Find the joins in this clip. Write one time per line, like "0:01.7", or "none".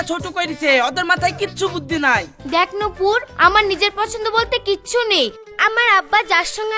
0:02.3